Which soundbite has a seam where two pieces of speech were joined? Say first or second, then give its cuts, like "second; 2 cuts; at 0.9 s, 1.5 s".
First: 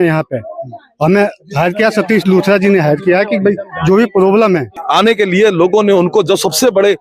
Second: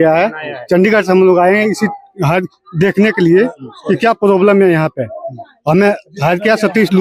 first; 1 cut; at 4.8 s